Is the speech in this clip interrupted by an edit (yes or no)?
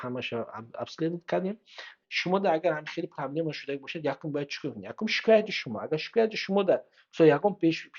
yes